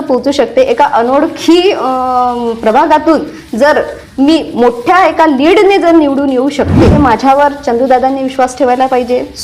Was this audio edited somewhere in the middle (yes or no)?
yes